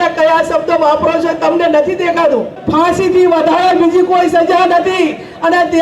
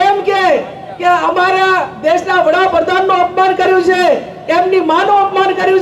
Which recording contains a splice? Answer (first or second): first